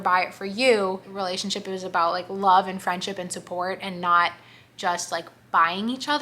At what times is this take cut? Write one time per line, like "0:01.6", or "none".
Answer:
0:01.1